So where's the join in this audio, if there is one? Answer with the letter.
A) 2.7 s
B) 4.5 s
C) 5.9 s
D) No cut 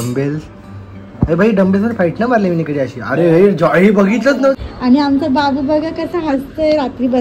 B